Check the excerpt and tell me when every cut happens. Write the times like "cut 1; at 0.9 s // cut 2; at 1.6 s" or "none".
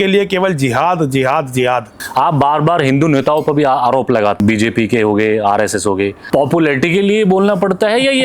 cut 1; at 1.9 s // cut 2; at 4.4 s // cut 3; at 6.2 s